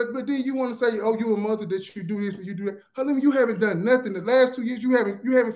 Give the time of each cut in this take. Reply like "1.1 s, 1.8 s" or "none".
none